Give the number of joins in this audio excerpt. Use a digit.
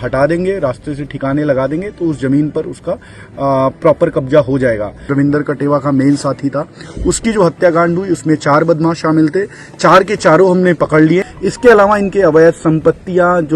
2